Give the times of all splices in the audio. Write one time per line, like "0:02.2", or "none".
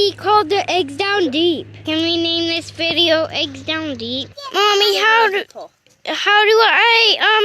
0:01.9
0:04.3